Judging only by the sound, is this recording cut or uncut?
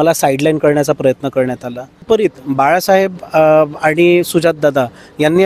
cut